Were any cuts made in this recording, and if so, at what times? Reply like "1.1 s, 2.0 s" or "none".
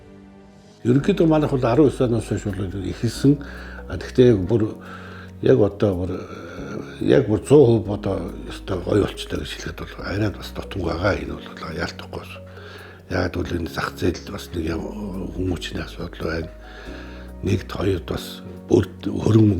1.0 s